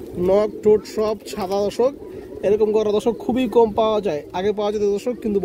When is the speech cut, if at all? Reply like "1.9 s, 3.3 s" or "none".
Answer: none